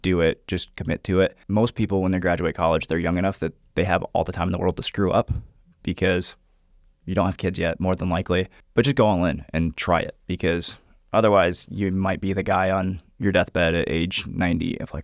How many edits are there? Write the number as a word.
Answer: two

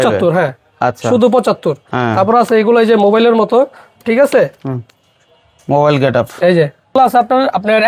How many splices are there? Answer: one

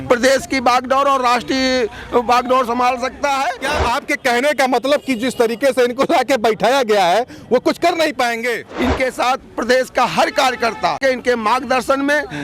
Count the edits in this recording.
three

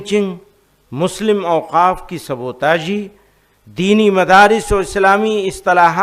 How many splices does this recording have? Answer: zero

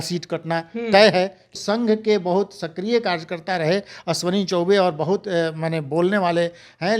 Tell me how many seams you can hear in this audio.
one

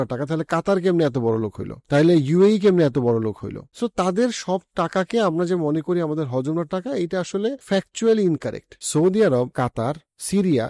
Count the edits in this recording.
two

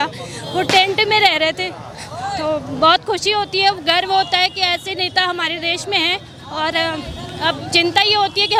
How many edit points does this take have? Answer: zero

